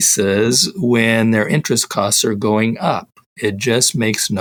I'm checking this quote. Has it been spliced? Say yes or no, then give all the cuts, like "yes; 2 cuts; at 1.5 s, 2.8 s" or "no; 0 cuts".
no; 0 cuts